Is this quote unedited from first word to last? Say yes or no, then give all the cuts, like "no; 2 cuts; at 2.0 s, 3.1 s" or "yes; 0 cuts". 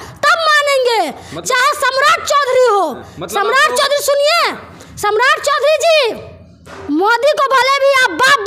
yes; 0 cuts